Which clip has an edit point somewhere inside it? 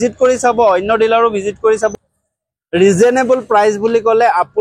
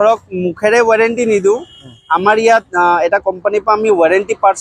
first; 1 cut; at 1.9 s

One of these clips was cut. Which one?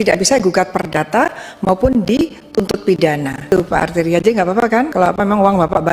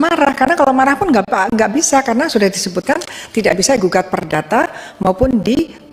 first; 2 cuts; at 3.5 s, 4.9 s

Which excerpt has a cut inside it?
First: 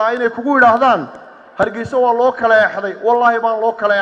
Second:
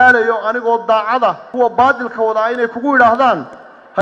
second; 1 cut; at 1.5 s

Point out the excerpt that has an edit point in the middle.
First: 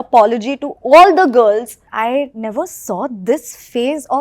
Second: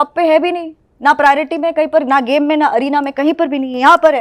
first; 1 cut; at 1.9 s

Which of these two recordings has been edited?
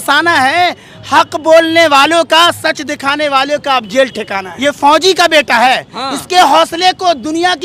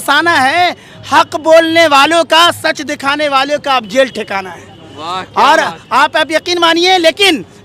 first; 1 cut; at 4.4 s

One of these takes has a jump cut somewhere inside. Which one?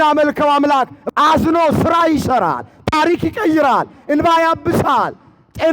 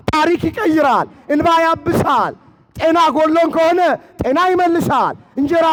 first; 1 cut; at 1.0 s

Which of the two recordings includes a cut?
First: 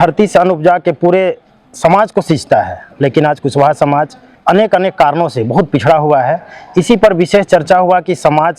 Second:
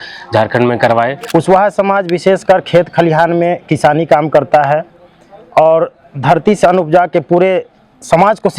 second; 1 cut; at 1.2 s

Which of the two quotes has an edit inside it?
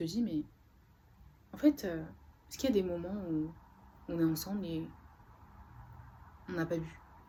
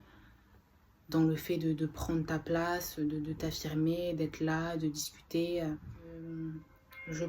second; 1 cut; at 6.2 s

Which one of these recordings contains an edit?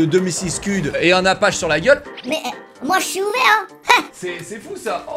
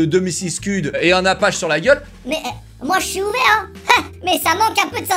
first; 1 cut; at 4.1 s

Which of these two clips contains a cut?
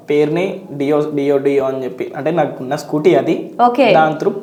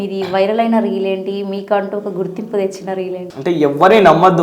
second; 1 cut; at 3.3 s

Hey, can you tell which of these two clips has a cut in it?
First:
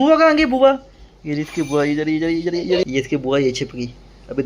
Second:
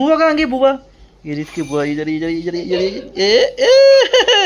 first; 1 cut; at 2.8 s

